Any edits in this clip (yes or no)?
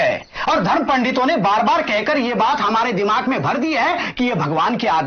no